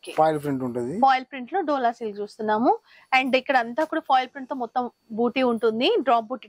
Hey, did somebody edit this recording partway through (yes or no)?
no